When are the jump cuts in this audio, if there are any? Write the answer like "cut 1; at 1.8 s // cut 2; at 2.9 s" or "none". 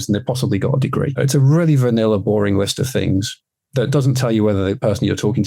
none